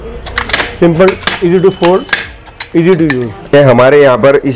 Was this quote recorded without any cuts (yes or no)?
no